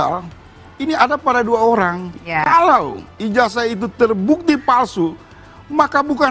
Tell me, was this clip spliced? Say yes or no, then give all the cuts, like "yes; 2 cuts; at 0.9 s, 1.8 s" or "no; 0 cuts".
yes; 1 cut; at 2.1 s